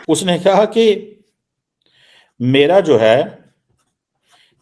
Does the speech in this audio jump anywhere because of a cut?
no; 0 cuts

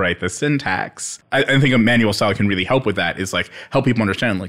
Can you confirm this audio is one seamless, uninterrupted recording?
no; 1 cut; at 1.2 s

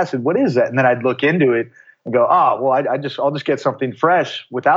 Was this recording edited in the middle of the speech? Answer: no; 0 cuts

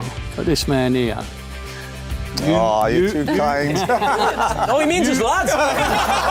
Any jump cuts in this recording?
no; 0 cuts

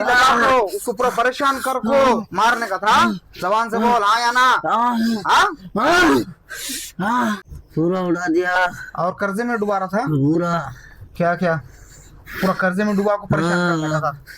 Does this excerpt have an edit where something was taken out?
yes; 1 cut; at 7.5 s

